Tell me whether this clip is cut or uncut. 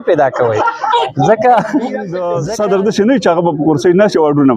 cut